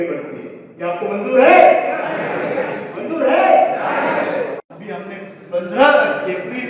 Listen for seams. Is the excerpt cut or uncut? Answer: cut